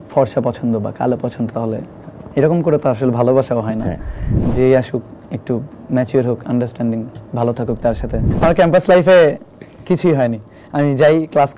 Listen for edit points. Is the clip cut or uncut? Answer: cut